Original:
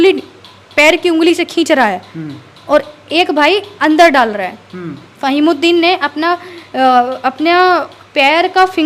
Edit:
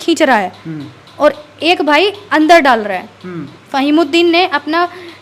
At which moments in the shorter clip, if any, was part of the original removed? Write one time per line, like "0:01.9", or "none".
none